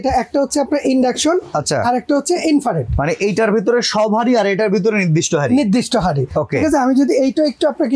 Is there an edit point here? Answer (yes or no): no